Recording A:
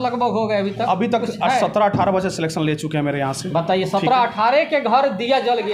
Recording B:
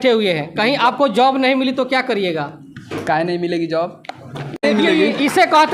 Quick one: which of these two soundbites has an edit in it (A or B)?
B